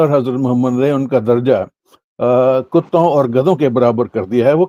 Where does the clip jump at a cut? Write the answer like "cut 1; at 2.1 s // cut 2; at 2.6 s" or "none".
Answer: none